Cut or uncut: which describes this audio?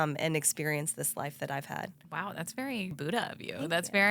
cut